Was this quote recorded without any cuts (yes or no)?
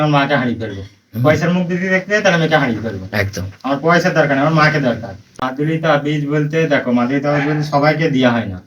no